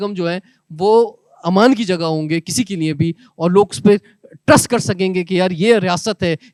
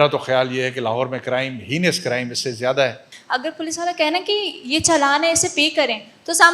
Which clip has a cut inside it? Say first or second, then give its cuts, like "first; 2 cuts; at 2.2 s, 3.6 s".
second; 1 cut; at 3.1 s